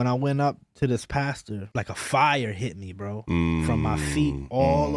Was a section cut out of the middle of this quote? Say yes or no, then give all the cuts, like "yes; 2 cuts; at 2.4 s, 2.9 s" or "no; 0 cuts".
yes; 1 cut; at 1.6 s